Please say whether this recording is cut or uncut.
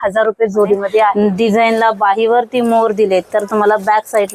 cut